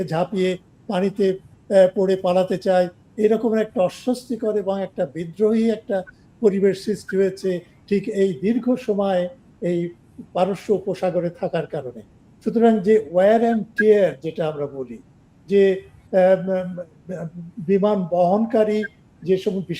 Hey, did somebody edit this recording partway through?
no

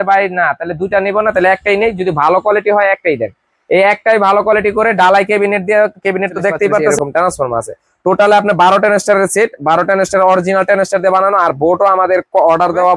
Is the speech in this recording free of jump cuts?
no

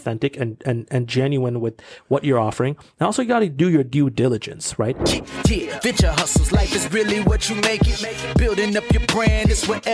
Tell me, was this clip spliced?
yes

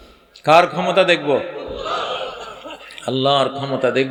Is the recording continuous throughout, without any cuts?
yes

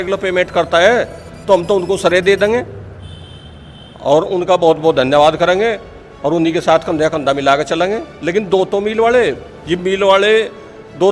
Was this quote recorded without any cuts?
yes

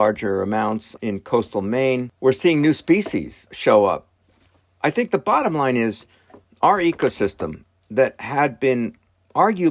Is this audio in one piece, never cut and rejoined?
no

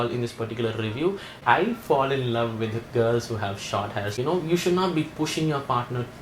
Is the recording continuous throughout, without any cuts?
no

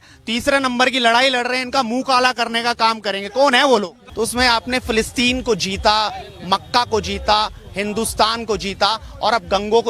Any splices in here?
yes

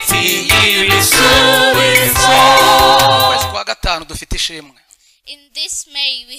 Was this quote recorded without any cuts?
no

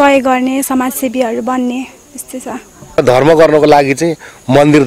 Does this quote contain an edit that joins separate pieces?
yes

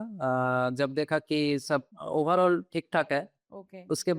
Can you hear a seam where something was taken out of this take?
yes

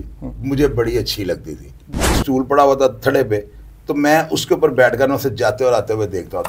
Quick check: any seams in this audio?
yes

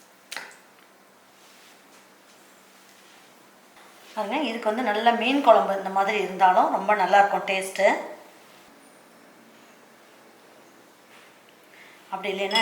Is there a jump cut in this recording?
no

